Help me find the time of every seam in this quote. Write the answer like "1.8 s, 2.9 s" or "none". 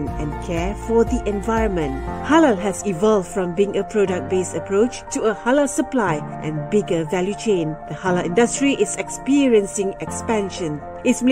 none